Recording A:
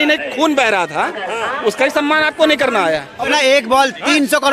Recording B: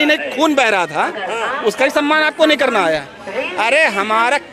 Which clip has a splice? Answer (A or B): A